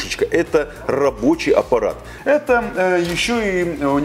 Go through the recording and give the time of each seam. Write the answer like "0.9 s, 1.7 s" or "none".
2.1 s